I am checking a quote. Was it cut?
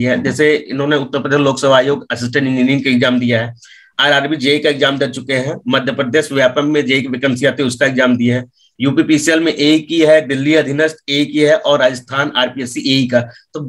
no; 0 cuts

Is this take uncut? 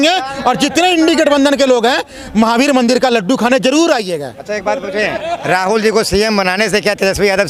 yes; 0 cuts

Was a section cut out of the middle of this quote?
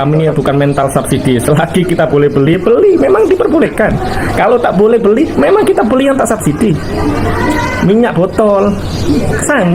no; 0 cuts

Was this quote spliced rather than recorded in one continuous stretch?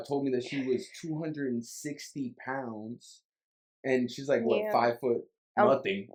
no; 0 cuts

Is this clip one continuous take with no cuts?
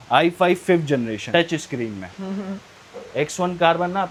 yes; 0 cuts

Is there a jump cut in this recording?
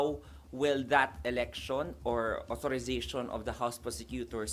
no; 0 cuts

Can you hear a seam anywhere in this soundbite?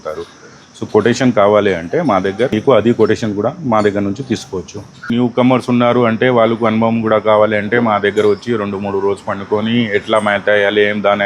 yes; 2 cuts; at 2.5 s, 5.1 s

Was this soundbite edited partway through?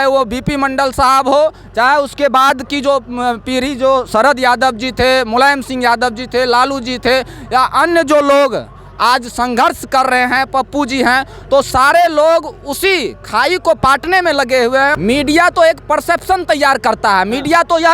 yes; 1 cut; at 15.0 s

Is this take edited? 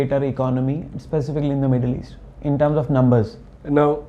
no; 0 cuts

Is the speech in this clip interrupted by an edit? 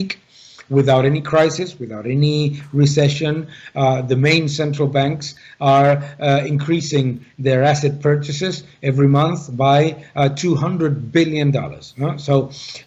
no; 0 cuts

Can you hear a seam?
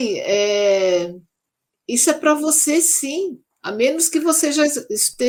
no; 0 cuts

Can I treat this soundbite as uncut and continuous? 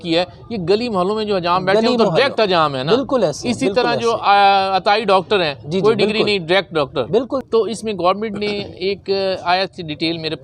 no; 1 cut; at 7.4 s

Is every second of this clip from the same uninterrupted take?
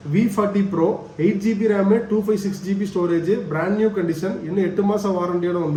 yes; 0 cuts

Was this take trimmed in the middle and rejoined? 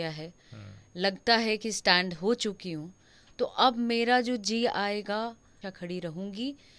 yes; 1 cut; at 5.6 s

